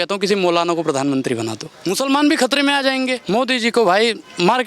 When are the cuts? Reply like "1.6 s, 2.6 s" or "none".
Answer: 1.7 s, 3.2 s